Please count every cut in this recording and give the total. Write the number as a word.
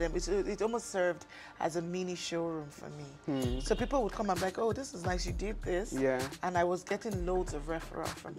zero